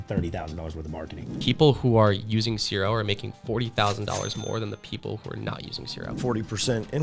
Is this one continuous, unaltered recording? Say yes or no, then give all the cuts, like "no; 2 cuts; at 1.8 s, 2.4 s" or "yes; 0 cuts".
no; 2 cuts; at 1.4 s, 6.1 s